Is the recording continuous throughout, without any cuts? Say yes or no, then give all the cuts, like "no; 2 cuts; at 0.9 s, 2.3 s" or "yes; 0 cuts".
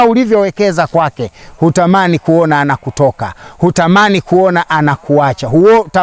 yes; 0 cuts